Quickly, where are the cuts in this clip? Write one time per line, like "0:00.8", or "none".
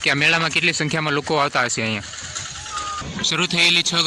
0:03.0

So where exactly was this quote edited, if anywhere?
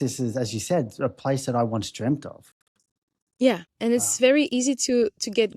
0:03.7

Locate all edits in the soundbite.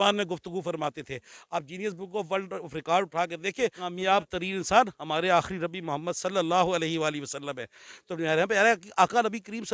0:03.9

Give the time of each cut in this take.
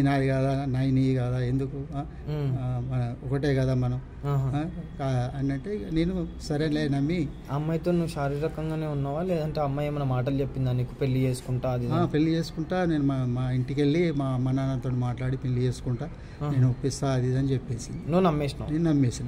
none

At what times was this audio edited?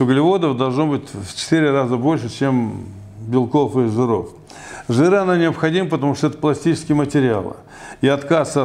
none

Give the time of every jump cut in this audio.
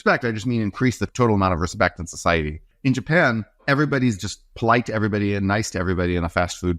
0:02.7
0:03.6

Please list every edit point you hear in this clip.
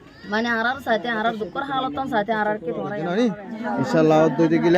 0:03.0

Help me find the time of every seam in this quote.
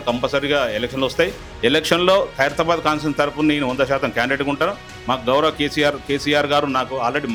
none

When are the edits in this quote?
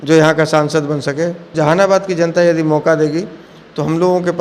0:01.4

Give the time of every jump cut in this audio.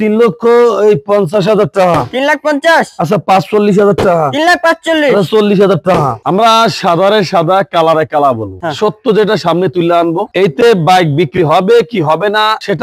0:06.2
0:08.5

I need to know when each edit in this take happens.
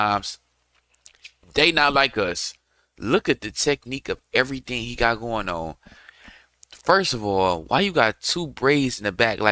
none

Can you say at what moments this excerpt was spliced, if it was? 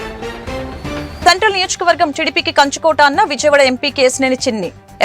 0:01.2

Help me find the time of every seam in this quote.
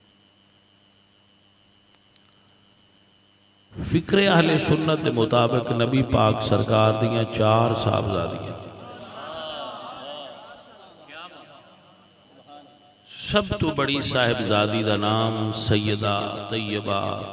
none

